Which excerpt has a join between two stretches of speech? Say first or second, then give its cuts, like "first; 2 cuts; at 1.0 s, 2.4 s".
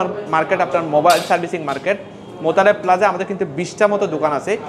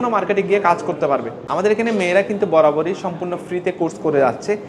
second; 1 cut; at 1.4 s